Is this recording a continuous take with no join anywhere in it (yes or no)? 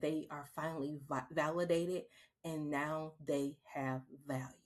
yes